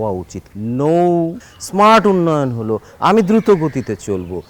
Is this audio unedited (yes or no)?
yes